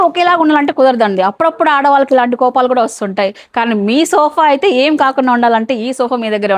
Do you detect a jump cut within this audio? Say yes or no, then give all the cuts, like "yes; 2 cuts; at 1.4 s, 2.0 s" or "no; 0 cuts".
no; 0 cuts